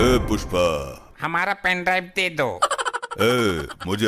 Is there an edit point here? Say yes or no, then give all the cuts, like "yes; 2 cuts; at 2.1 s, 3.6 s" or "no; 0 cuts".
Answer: yes; 1 cut; at 1.1 s